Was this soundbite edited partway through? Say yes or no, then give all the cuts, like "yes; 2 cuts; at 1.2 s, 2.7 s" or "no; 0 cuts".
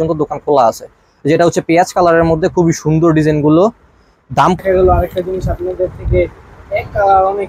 yes; 1 cut; at 4.6 s